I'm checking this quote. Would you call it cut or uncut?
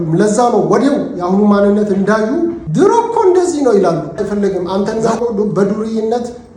cut